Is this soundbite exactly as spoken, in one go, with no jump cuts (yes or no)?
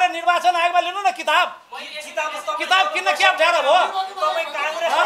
yes